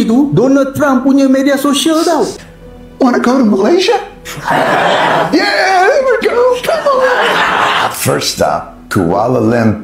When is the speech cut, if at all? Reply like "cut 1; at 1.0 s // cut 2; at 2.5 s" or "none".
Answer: cut 1; at 2.3 s